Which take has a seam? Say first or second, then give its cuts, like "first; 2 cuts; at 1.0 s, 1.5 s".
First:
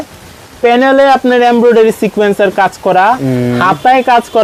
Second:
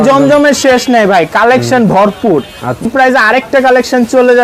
second; 1 cut; at 2.9 s